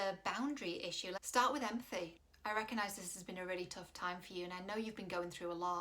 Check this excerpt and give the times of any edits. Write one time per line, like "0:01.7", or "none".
0:01.2
0:02.2